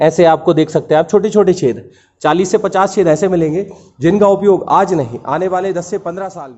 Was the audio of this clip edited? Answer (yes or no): no